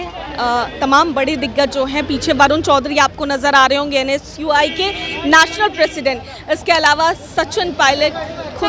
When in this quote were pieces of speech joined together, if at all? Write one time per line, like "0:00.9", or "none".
none